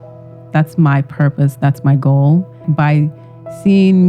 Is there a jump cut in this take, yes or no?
yes